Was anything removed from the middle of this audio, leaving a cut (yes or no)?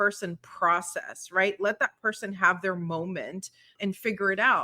yes